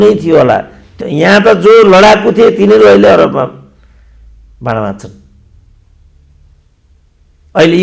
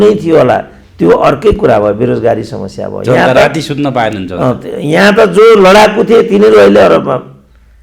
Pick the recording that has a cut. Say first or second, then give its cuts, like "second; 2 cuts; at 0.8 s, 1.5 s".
first; 1 cut; at 0.9 s